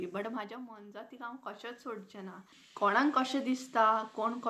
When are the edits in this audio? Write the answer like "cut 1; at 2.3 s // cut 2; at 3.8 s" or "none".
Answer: cut 1; at 2.6 s